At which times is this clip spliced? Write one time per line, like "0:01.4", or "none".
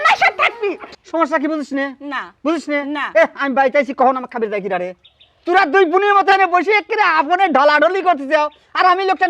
0:00.9